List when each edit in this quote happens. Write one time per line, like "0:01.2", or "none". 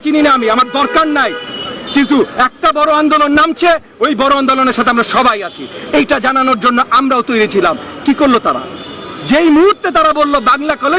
none